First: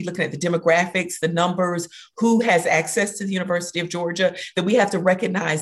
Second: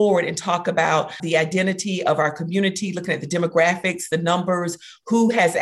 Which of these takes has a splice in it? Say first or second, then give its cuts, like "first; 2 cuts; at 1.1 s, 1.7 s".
second; 1 cut; at 1.2 s